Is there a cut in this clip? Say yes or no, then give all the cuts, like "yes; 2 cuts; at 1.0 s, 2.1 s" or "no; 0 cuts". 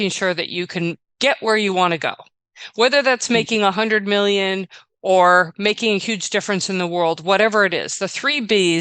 yes; 1 cut; at 1.1 s